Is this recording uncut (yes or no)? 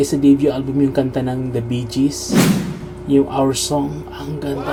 yes